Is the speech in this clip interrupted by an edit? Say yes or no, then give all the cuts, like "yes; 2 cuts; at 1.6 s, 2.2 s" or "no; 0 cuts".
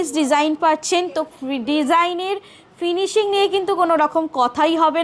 no; 0 cuts